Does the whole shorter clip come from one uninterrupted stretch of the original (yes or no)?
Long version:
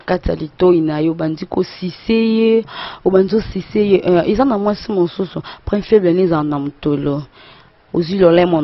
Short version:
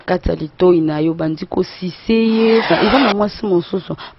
no